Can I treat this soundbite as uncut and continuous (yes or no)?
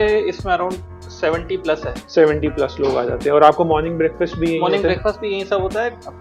yes